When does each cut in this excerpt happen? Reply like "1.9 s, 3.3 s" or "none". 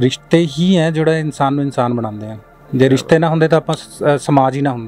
none